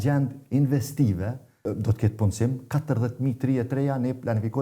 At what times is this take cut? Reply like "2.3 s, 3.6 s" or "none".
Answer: 1.6 s